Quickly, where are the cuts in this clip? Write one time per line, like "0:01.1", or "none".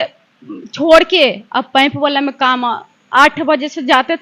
none